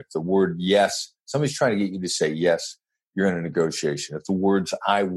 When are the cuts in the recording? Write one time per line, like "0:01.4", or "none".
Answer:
none